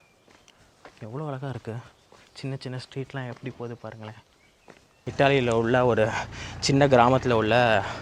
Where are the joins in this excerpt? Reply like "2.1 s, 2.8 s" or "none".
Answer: 5.0 s